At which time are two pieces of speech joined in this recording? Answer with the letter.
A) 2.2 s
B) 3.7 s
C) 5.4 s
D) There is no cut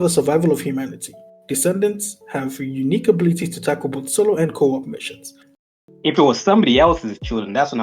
C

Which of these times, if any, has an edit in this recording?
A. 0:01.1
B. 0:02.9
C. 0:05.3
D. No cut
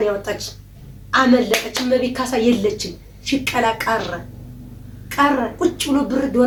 D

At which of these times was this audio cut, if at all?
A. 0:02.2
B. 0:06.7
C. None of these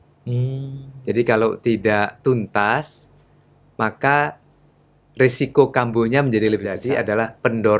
B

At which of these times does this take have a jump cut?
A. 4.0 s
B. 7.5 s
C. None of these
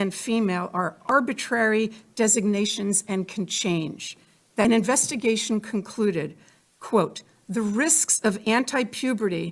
A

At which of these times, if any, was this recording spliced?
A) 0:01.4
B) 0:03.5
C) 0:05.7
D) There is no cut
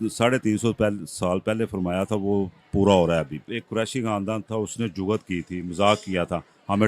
B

